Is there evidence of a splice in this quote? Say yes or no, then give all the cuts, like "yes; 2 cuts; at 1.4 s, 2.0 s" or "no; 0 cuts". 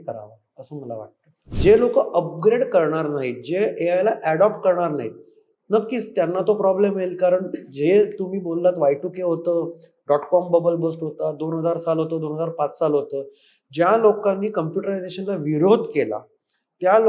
yes; 1 cut; at 1.5 s